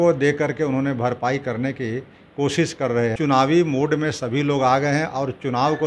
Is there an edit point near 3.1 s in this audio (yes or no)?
yes